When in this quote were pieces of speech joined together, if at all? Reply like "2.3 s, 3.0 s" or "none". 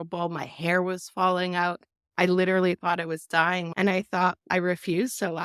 3.7 s, 4.4 s